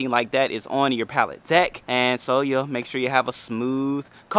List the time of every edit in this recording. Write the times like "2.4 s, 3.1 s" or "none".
1.8 s